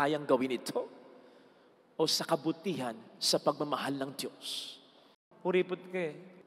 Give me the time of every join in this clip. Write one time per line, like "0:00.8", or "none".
0:05.2